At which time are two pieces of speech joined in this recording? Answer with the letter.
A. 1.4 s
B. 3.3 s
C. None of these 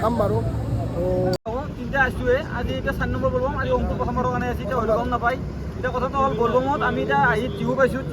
A